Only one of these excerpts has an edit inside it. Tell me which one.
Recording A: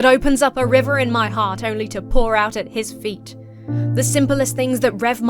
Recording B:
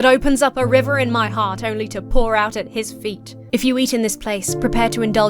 B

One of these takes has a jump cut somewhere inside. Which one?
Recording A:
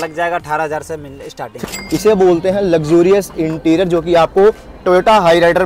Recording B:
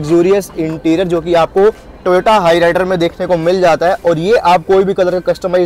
A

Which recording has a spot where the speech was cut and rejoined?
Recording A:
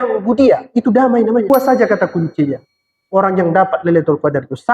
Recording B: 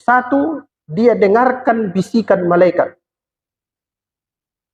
A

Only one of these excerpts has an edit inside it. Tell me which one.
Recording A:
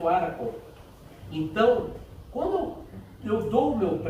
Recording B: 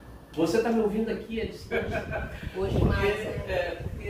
B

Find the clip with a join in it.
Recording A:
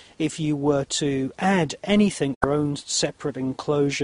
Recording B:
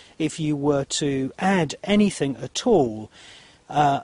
B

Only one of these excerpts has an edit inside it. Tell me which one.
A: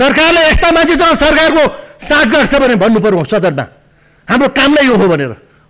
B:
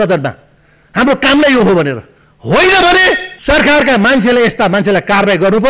B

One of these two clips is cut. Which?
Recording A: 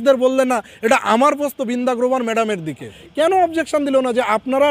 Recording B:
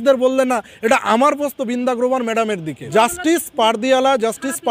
A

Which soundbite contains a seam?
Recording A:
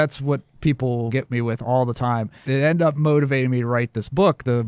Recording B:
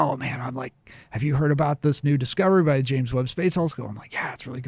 A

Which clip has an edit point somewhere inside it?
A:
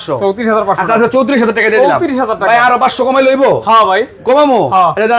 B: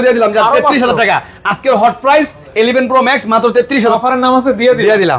B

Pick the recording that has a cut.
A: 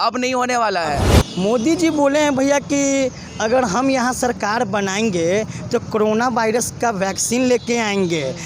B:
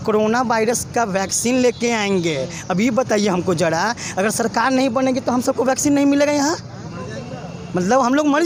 A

